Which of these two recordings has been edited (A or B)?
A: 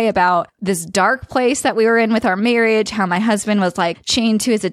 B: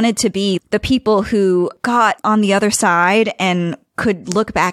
B